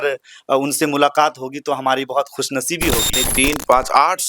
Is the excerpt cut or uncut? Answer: cut